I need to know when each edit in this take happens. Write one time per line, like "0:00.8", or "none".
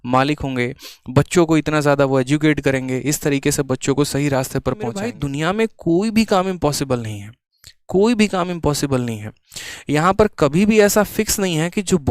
0:05.2

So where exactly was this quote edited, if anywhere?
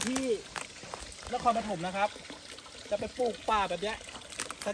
none

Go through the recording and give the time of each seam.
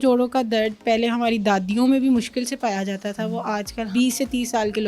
0:03.9

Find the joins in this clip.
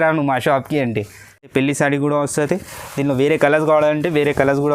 0:01.5

